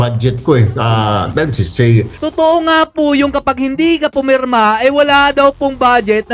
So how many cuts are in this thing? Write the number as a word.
one